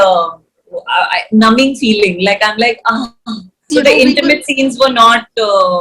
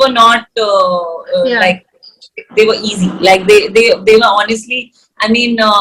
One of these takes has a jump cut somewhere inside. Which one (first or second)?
first